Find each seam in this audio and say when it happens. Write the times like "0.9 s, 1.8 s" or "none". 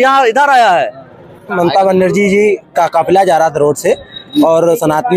1.5 s